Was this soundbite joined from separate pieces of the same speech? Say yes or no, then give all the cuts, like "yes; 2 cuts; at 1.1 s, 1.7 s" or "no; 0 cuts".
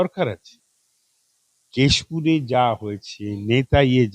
no; 0 cuts